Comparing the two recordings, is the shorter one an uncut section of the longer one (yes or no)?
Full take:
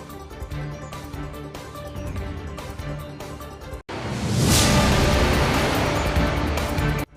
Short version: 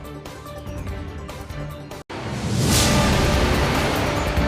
no